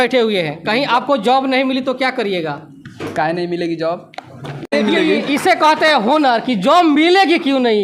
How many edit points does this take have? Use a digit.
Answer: 1